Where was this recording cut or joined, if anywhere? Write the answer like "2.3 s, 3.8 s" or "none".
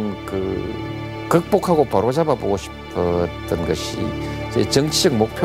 none